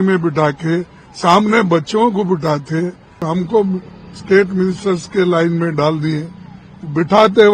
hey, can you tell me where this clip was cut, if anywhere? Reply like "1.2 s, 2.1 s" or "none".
3.3 s